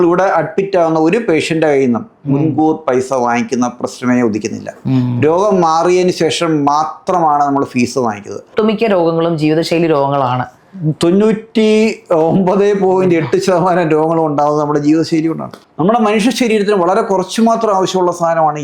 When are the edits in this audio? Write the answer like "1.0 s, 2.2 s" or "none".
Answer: 8.5 s, 15.5 s

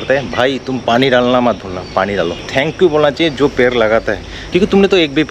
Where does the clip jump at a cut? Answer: 2.4 s, 4.4 s

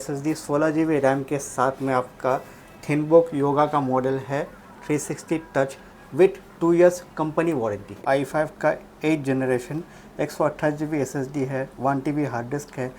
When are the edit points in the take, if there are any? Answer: 8.0 s

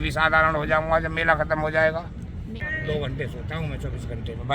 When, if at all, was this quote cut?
2.6 s

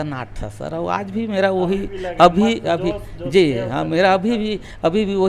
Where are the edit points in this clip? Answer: none

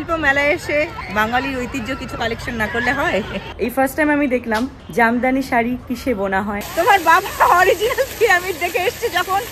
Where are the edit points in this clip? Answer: 1.0 s, 3.4 s, 4.8 s, 6.6 s

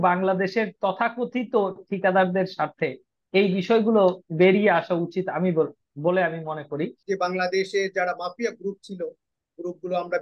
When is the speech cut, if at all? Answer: 7.0 s

